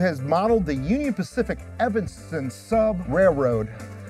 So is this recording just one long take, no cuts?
no; 1 cut; at 3.0 s

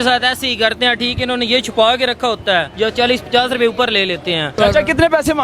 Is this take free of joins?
no; 2 cuts; at 2.7 s, 4.5 s

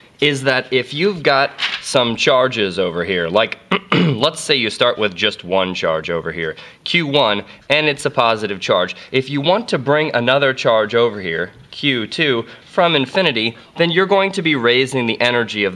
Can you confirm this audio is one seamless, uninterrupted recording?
no; 1 cut; at 8.0 s

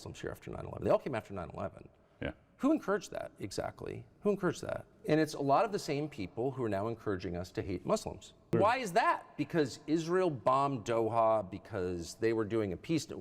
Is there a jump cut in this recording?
yes; 1 cut; at 8.5 s

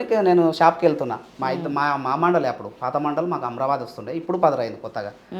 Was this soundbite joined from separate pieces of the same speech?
no; 0 cuts

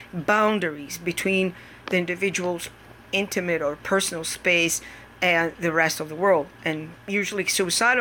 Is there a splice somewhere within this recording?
no; 0 cuts

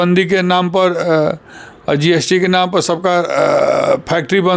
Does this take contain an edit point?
no; 0 cuts

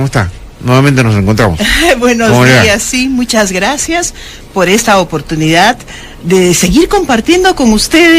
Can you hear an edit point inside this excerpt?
yes; 1 cut; at 2.9 s

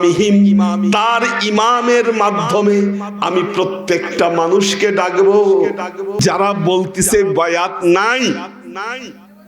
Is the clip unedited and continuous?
no; 1 cut; at 6.2 s

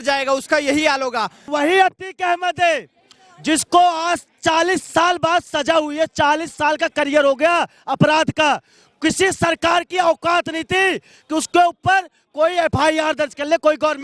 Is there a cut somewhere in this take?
yes; 1 cut; at 1.5 s

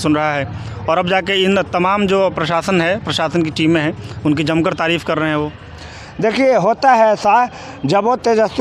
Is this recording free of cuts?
yes; 0 cuts

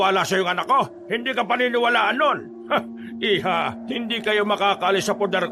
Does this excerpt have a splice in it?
yes; 3 cuts; at 1.0 s, 2.5 s, 3.8 s

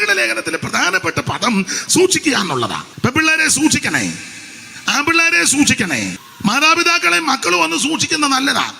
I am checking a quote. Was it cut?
yes; 2 cuts; at 2.8 s, 6.3 s

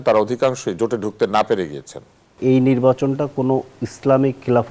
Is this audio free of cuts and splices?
no; 1 cut; at 2.4 s

